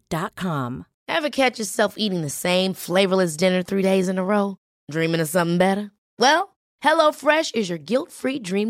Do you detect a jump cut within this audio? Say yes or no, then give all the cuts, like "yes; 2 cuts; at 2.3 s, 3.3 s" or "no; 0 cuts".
yes; 1 cut; at 0.9 s